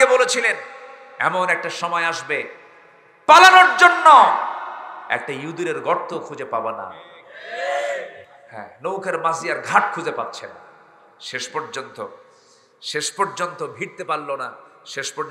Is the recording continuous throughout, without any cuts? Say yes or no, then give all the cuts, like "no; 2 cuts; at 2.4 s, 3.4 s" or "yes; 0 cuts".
no; 1 cut; at 8.1 s